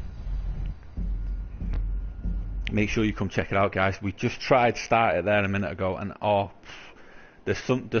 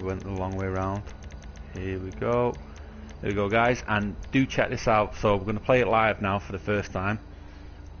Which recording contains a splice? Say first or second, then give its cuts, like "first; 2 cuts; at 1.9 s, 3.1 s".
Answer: second; 1 cut; at 4.9 s